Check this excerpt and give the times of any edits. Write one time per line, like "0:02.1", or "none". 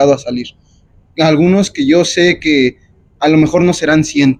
none